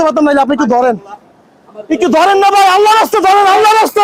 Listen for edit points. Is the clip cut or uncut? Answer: uncut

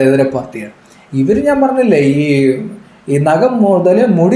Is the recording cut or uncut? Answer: uncut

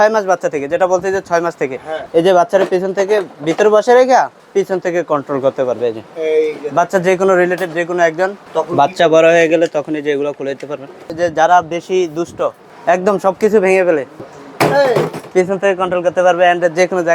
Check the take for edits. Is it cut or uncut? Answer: cut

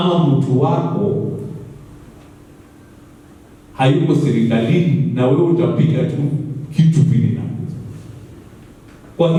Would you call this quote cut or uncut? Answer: uncut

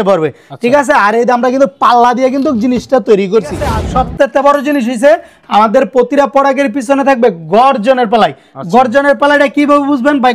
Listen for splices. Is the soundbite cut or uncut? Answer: cut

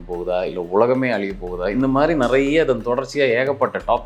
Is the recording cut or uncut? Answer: uncut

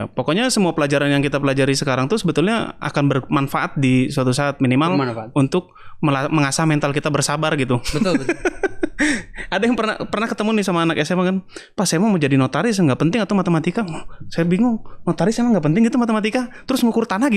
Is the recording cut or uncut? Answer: uncut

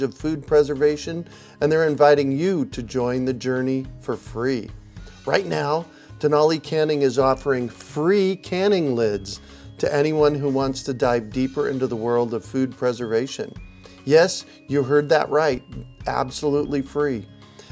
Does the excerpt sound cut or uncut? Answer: uncut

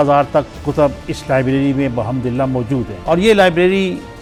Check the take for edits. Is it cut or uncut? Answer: uncut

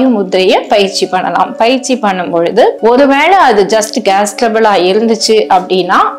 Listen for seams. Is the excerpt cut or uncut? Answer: uncut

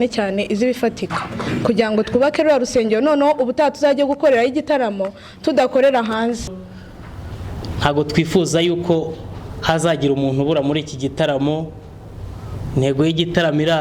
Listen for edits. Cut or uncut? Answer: cut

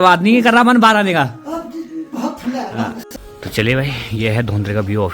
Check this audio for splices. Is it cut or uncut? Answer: cut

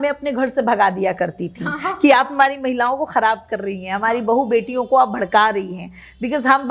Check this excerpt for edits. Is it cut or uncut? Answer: uncut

